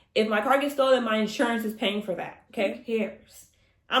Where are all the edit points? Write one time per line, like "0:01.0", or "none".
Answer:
0:02.8